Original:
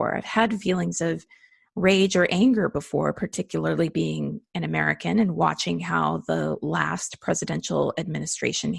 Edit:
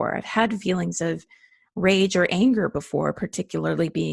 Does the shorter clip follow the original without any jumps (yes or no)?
yes